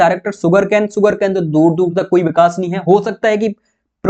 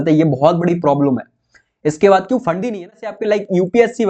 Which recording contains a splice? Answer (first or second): second